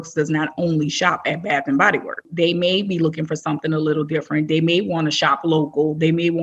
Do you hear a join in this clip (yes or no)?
yes